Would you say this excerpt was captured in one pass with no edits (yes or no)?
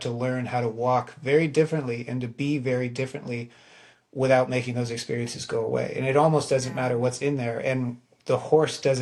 yes